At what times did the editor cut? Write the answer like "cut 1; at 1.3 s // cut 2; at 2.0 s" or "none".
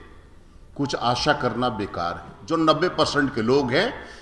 cut 1; at 2.3 s